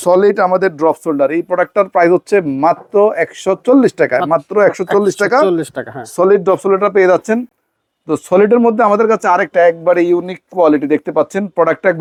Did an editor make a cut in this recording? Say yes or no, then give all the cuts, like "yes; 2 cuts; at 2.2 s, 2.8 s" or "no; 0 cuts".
no; 0 cuts